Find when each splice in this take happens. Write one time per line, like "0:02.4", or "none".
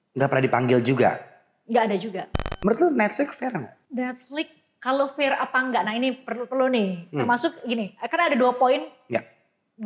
0:02.4
0:03.8